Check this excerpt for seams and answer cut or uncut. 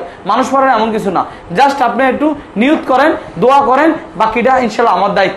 uncut